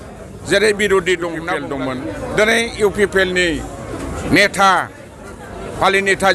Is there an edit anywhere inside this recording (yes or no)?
yes